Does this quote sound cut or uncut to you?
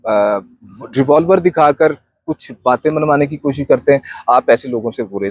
uncut